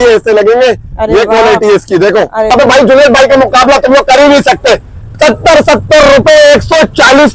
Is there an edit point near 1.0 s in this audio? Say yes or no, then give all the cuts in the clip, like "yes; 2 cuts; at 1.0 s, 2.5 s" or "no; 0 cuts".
no; 1 cut; at 2.5 s